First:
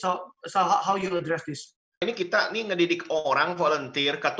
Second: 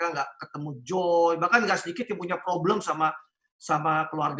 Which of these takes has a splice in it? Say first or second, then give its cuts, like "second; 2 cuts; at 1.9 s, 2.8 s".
first; 1 cut; at 2.0 s